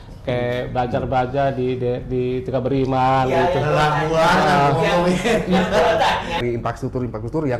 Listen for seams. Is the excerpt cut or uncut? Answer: cut